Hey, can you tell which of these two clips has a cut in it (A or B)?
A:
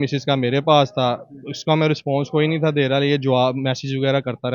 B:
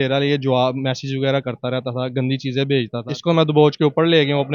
B